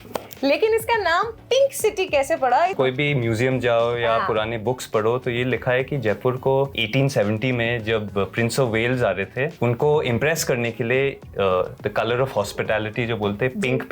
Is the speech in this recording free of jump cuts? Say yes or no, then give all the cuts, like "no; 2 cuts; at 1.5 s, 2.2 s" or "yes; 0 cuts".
no; 2 cuts; at 2.7 s, 9.5 s